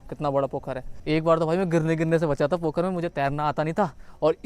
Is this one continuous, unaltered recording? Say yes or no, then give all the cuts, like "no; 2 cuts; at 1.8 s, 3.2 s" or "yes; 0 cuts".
no; 1 cut; at 0.9 s